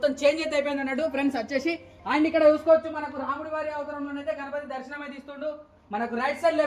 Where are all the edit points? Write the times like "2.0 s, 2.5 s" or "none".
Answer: none